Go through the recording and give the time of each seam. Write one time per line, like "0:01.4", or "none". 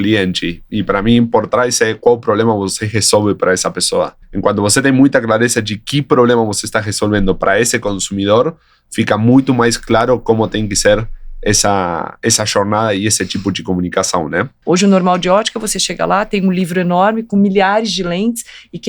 0:04.2
0:14.5